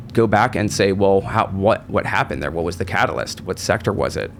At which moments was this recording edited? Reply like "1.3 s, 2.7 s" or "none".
none